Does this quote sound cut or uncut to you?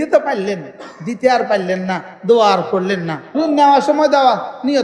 cut